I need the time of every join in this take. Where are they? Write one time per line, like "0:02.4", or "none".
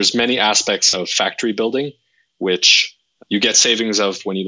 0:03.1